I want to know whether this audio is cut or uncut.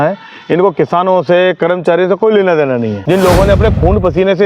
cut